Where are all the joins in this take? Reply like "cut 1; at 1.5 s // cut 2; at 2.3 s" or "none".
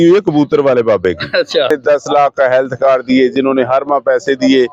cut 1; at 1.7 s